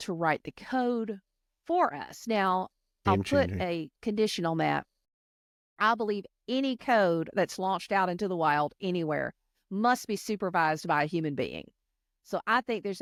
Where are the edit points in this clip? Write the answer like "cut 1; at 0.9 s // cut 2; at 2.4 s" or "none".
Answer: none